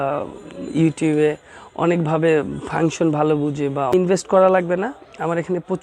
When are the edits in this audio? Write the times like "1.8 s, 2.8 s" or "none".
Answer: 3.9 s